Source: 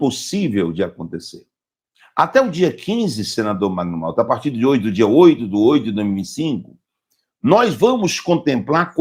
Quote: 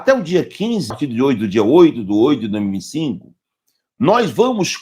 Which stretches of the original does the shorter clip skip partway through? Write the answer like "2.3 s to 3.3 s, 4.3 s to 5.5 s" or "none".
3.2 s to 4.4 s